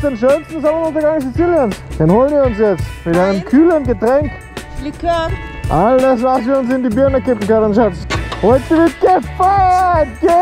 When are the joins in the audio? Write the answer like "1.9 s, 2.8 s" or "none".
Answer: none